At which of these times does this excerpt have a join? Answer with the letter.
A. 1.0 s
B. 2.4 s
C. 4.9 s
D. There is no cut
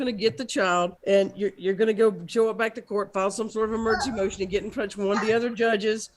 A